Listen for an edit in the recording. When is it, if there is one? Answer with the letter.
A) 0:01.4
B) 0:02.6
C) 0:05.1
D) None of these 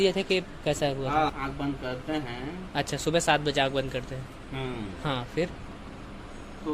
A